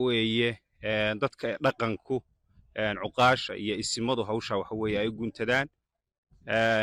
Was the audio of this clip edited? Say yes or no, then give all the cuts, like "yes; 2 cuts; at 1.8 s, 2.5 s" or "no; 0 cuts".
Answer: no; 0 cuts